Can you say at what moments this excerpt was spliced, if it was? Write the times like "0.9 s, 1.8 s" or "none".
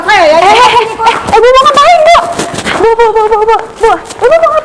2.6 s

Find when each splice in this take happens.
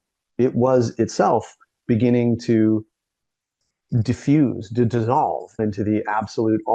5.6 s

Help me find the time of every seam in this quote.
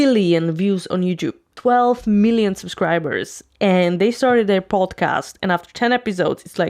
1.5 s

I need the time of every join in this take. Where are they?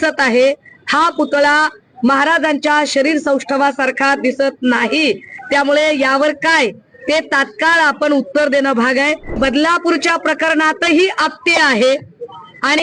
9.3 s

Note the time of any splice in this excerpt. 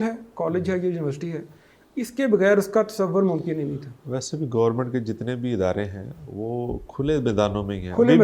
none

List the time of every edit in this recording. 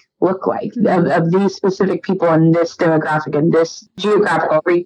3.9 s

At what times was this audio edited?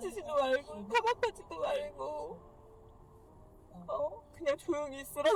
none

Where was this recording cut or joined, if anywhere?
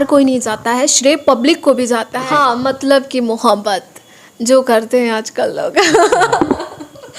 2.2 s

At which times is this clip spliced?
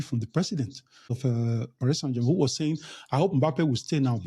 1.3 s

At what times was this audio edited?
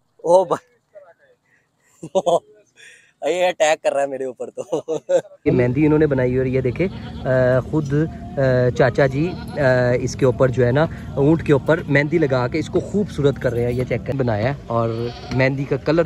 5.5 s, 14.1 s

